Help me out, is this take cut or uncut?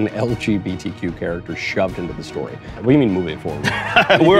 cut